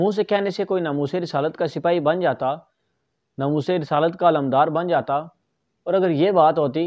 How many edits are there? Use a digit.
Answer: 0